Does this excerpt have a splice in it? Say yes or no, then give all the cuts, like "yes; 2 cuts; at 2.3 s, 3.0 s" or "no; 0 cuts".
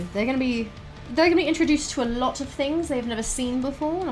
yes; 1 cut; at 1.0 s